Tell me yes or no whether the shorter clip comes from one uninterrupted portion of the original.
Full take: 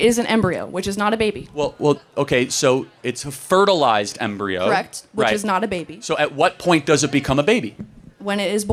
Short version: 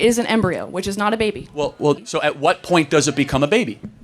no